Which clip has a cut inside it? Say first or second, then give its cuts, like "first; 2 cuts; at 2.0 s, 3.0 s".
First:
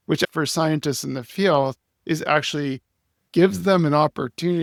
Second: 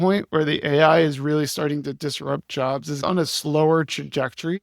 second; 1 cut; at 3.0 s